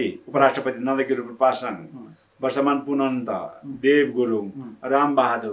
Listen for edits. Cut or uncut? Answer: uncut